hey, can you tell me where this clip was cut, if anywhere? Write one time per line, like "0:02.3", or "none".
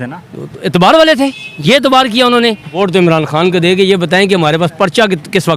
0:02.6

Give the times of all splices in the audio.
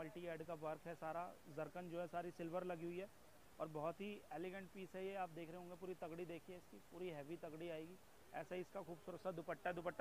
none

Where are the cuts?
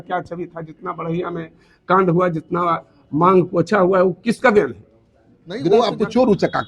0:05.6

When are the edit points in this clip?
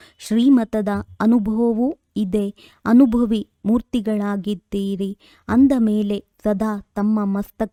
none

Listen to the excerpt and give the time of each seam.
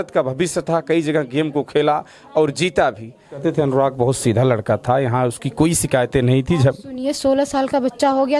0:03.4

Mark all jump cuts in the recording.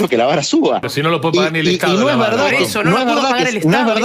0:00.9

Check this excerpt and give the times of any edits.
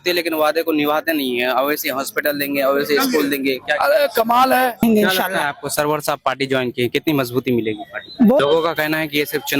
0:04.8
0:08.4

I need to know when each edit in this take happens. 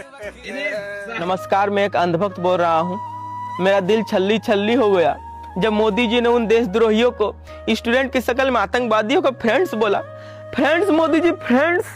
0:01.2

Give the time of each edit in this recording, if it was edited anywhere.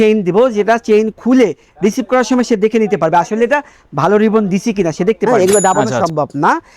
0:05.2

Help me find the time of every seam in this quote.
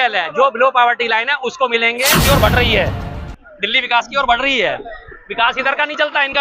0:02.1

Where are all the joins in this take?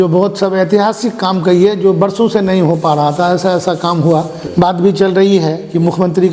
0:04.4

